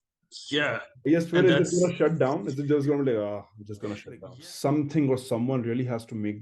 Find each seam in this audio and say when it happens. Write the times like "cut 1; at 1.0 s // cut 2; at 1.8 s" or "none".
cut 1; at 4.2 s